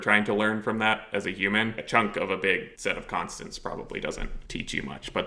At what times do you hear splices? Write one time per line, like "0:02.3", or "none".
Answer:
0:01.8
0:02.7
0:04.4